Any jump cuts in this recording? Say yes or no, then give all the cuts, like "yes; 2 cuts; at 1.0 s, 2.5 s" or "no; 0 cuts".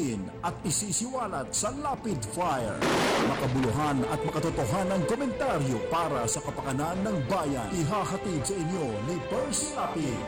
no; 0 cuts